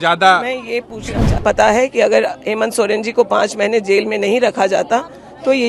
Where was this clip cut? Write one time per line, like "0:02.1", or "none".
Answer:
0:01.4